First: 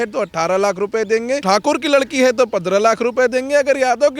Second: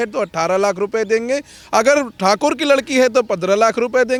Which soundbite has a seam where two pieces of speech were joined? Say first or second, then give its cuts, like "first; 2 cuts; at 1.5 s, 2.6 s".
first; 1 cut; at 1.4 s